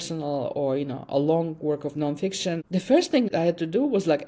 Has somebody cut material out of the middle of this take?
yes; 2 cuts; at 2.6 s, 3.3 s

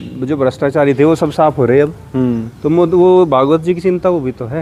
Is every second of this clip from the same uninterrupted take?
yes; 0 cuts

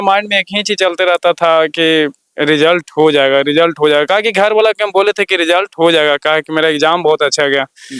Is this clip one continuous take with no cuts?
yes; 0 cuts

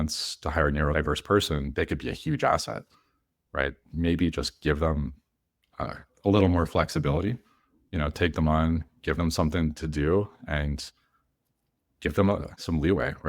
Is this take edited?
yes; 1 cut; at 0.9 s

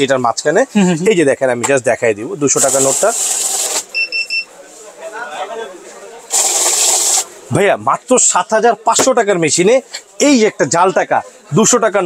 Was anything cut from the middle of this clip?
no; 0 cuts

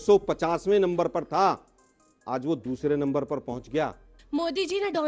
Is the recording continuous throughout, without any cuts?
no; 1 cut; at 4.2 s

